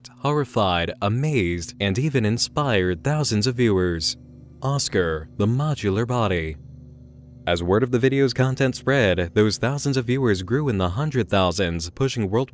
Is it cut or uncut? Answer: uncut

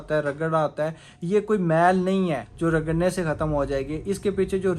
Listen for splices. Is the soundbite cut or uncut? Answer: cut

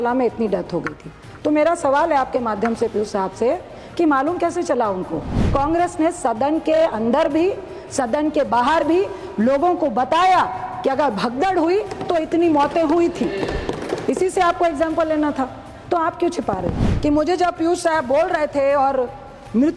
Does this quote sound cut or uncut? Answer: cut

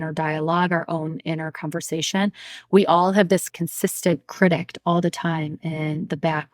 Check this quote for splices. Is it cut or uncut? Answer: cut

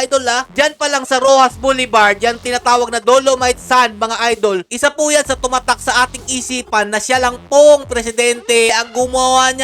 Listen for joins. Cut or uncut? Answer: uncut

